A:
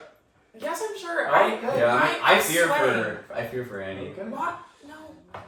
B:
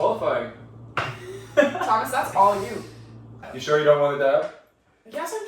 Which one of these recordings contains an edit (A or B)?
B